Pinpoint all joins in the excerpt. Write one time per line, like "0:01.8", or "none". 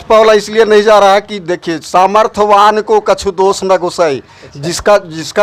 none